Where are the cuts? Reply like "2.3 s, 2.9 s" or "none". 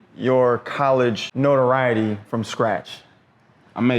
1.3 s